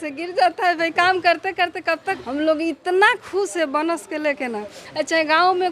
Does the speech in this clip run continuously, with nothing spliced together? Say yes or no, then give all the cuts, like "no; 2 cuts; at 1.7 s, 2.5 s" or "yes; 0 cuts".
no; 1 cut; at 2.1 s